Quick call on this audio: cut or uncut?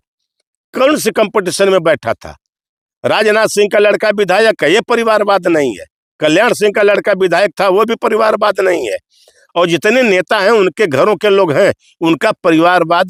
uncut